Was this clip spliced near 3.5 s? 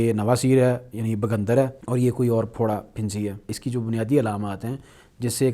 yes; 2 cuts; at 1.8 s, 3.5 s

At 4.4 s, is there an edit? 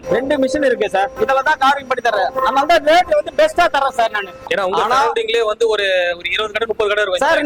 yes; 2 cuts; at 1.1 s, 4.4 s

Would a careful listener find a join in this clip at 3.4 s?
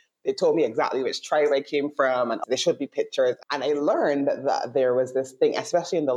yes; 2 cuts; at 2.4 s, 3.4 s

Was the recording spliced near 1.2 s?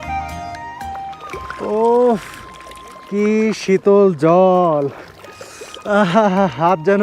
yes; 1 cut; at 1.2 s

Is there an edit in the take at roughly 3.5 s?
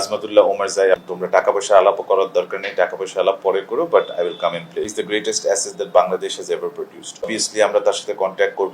no; 3 cuts; at 1.1 s, 4.9 s, 7.3 s

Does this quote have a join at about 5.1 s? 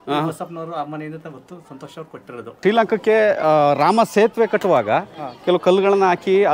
no; 1 cut; at 2.6 s

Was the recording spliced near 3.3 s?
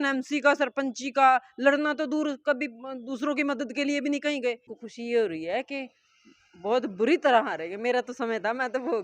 no; 1 cut; at 4.7 s

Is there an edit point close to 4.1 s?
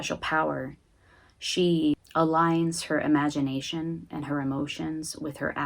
no; 1 cut; at 2.0 s

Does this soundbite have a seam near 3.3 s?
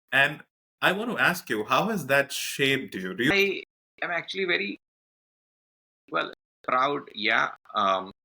yes; 1 cut; at 3.3 s

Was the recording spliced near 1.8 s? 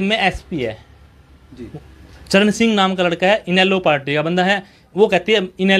no; 0 cuts

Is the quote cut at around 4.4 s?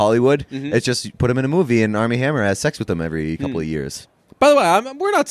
no; 0 cuts

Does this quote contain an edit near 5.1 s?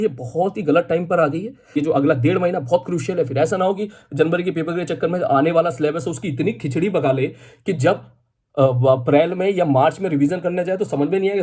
no; 1 cut; at 1.8 s

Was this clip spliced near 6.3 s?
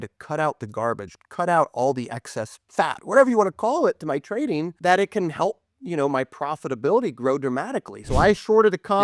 no; 2 cuts; at 4.7 s, 8.0 s

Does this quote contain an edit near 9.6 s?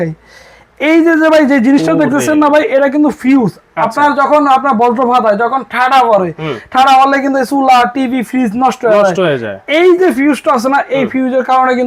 no; 0 cuts

